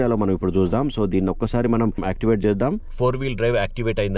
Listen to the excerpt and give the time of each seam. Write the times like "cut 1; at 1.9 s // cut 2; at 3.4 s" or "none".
cut 1; at 2.9 s